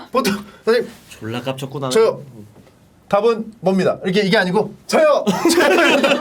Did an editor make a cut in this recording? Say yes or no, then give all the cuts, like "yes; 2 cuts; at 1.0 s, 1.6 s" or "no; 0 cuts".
no; 0 cuts